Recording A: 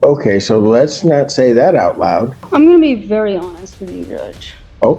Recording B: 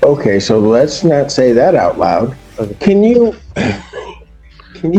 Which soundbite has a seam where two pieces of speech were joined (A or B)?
A